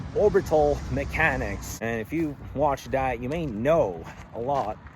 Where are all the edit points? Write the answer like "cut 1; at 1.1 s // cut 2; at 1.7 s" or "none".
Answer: cut 1; at 1.6 s